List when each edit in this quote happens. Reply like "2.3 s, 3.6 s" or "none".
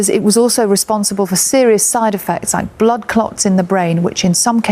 2.5 s